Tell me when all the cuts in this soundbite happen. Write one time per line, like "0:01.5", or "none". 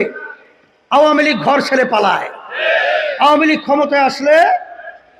none